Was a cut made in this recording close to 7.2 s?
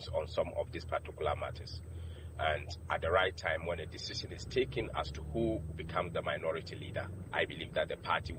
yes; 1 cut; at 7.2 s

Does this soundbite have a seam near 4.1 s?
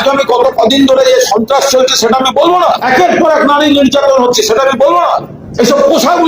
no; 2 cuts; at 2.8 s, 5.4 s

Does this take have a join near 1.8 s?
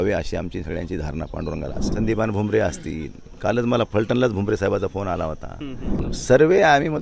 yes; 2 cuts; at 1.8 s, 6.1 s

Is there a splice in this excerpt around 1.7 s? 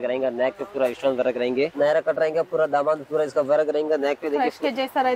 yes; 1 cut; at 1.7 s

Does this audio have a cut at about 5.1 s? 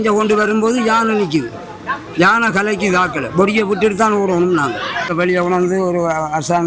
no; 0 cuts

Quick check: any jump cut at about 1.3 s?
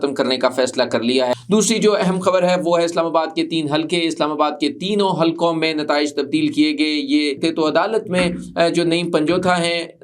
yes; 2 cuts; at 1.3 s, 7.4 s

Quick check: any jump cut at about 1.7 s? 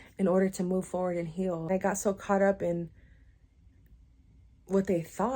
yes; 1 cut; at 1.7 s

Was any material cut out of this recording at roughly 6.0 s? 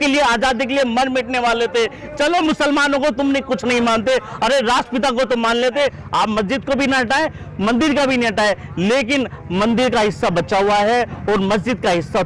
yes; 1 cut; at 6.0 s

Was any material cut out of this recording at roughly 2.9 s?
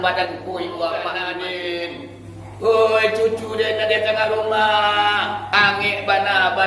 no; 1 cut; at 1.2 s

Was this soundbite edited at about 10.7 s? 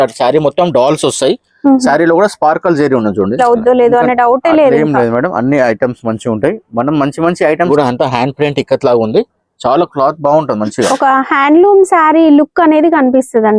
no; 2 cuts; at 3.4 s, 7.7 s

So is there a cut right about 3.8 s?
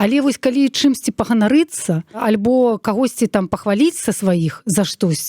no; 1 cut; at 2.2 s

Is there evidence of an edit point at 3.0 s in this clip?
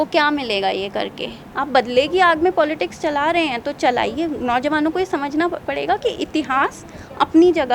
no; 1 cut; at 1.5 s

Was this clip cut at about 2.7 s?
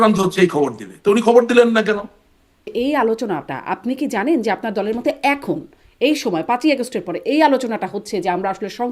yes; 1 cut; at 2.7 s

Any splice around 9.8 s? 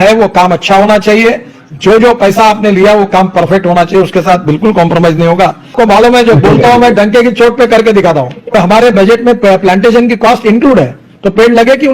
no; 2 cuts; at 5.7 s, 8.5 s

